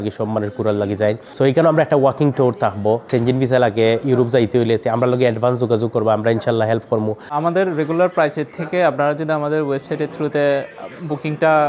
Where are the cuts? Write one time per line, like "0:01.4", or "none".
0:01.3
0:03.1
0:07.3